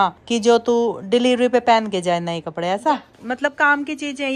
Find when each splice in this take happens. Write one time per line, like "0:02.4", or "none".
0:03.1